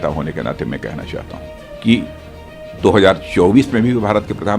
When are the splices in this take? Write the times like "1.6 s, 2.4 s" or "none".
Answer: 1.7 s

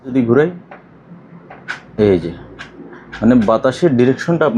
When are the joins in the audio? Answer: none

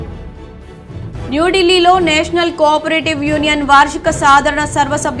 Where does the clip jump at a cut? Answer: 1.3 s

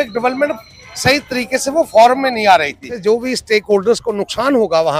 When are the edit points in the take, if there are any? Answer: 2.9 s

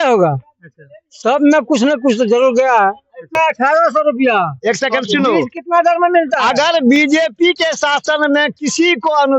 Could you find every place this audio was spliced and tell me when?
3.4 s

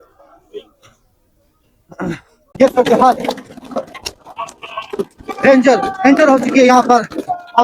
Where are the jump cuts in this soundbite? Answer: 2.4 s

